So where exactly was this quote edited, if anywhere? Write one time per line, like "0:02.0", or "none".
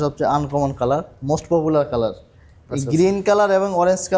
none